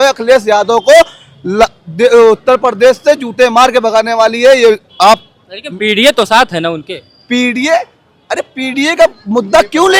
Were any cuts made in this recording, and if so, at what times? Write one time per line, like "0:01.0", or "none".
none